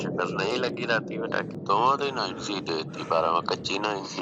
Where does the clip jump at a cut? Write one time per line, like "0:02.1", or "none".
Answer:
none

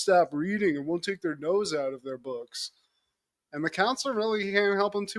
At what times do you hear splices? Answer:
none

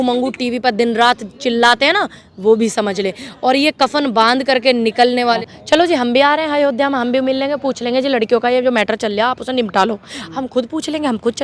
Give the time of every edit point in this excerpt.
0:05.4

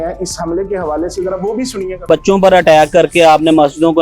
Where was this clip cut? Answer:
0:02.0

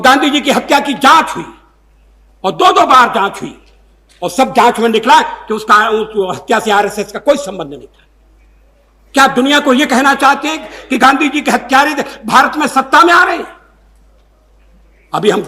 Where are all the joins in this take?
none

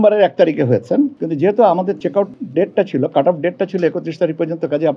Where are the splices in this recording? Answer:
0:01.2
0:02.0

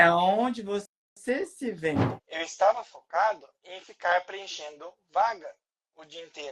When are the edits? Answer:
0:02.2

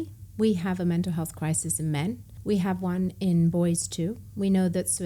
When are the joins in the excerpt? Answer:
0:02.3

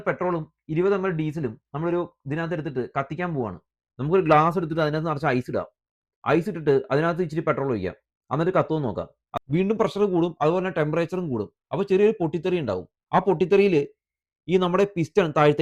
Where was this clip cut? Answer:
0:03.9
0:09.2

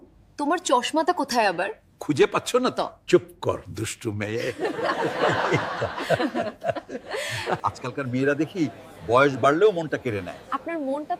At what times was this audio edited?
none

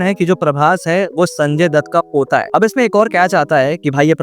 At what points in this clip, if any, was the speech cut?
0:02.5

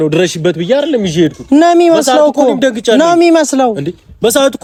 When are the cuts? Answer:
none

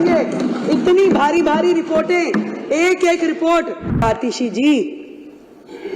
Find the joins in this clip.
0:04.0

